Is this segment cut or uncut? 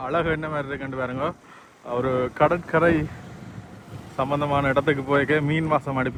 uncut